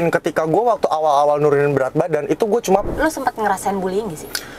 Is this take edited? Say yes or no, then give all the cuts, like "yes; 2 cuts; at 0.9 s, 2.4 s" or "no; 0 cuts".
yes; 1 cut; at 2.9 s